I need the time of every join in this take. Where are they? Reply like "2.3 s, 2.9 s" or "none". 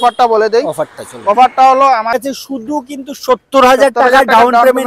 2.2 s